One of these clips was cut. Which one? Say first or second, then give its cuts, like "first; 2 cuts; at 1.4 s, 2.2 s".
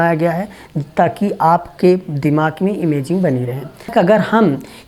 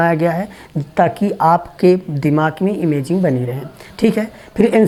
first; 1 cut; at 3.9 s